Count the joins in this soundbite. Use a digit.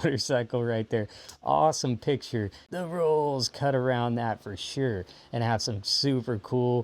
1